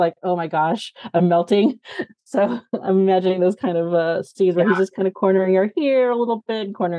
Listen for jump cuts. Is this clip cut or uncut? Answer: uncut